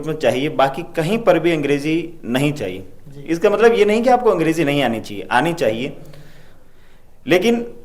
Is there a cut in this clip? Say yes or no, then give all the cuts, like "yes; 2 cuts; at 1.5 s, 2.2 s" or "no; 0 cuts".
no; 0 cuts